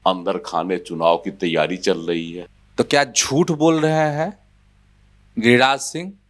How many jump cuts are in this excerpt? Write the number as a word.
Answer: one